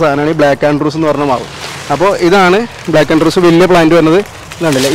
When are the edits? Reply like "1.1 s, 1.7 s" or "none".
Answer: none